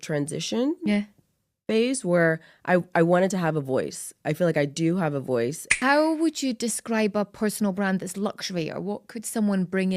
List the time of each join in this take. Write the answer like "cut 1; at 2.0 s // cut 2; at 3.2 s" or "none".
cut 1; at 5.7 s